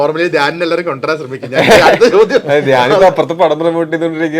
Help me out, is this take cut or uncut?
uncut